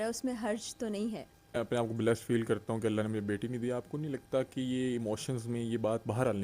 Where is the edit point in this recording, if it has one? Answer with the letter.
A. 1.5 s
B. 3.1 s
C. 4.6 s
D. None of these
A